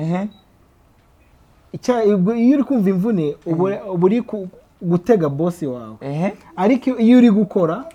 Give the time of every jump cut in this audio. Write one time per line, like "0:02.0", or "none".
none